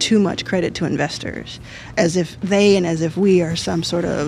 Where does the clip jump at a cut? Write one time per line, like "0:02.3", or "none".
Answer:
0:01.8